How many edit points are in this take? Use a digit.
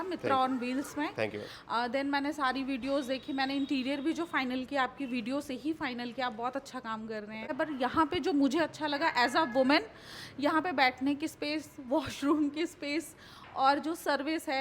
1